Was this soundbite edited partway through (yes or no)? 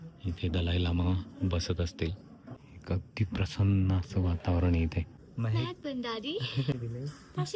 yes